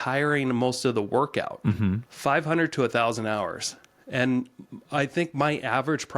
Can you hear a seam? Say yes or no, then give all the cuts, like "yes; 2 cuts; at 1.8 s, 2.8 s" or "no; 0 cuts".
yes; 1 cut; at 2.1 s